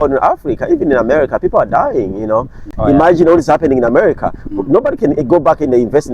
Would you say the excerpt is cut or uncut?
cut